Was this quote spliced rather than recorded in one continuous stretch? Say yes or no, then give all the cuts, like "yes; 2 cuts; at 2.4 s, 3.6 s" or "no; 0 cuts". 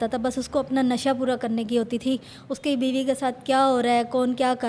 no; 0 cuts